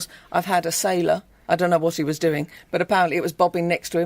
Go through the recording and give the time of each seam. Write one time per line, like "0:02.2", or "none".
0:01.3